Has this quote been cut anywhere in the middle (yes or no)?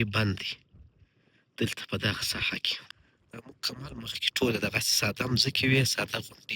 yes